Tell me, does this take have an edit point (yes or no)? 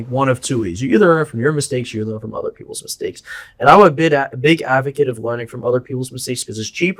no